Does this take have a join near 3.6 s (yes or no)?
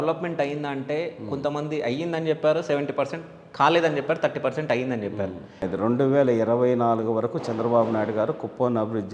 no